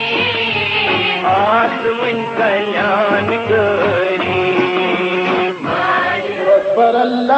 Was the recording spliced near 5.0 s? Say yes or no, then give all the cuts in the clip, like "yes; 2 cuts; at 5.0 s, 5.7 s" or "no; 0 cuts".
no; 1 cut; at 1.5 s